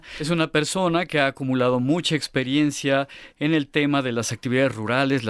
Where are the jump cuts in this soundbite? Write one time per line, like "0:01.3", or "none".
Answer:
0:04.1